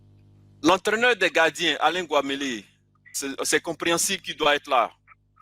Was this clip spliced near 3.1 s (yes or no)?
yes